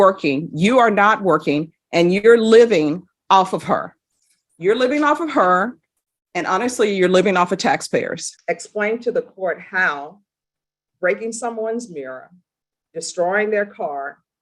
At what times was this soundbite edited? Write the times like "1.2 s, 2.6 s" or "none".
8.3 s